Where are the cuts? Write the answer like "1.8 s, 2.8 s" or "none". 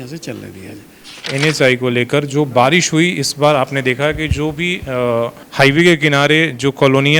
1.3 s